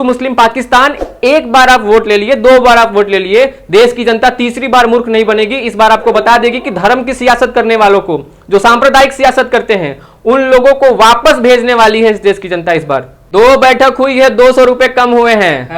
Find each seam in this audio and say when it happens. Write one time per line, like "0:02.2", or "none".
0:13.2